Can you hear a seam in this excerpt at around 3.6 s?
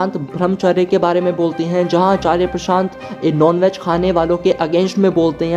no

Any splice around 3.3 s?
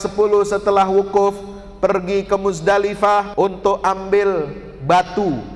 yes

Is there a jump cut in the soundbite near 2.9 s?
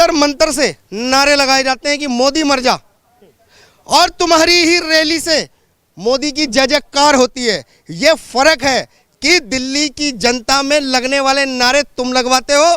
no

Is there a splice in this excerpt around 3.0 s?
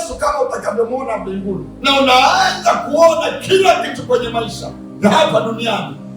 no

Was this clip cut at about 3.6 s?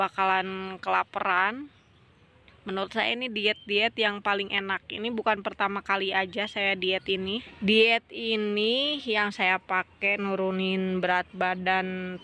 no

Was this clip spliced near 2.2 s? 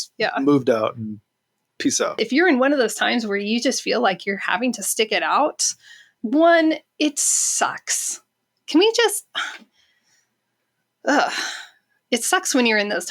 yes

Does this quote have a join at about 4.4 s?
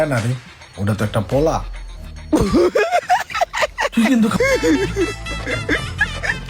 yes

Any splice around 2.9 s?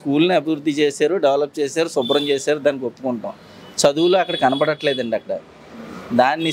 no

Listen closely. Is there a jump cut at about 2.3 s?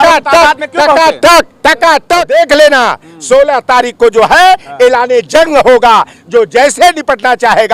yes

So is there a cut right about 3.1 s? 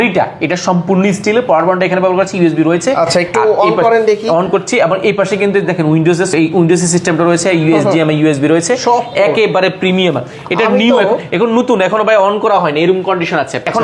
no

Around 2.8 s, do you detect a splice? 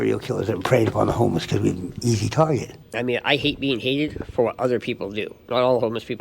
yes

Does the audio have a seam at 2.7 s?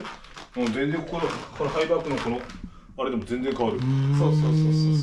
no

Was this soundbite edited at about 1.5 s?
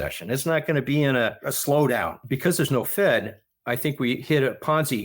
yes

